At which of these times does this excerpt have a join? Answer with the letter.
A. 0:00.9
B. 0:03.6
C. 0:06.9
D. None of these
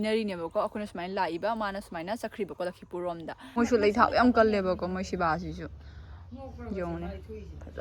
B